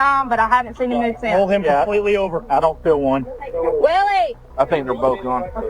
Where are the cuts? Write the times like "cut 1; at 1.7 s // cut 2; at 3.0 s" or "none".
cut 1; at 4.4 s